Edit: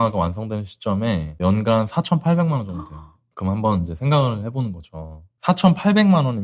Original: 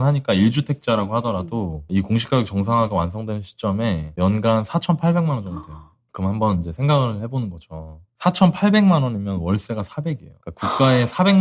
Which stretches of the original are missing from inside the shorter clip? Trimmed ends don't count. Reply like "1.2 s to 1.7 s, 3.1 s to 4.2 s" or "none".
none

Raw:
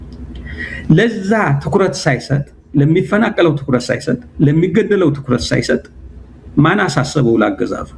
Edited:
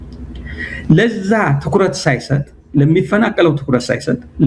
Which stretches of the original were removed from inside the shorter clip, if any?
none

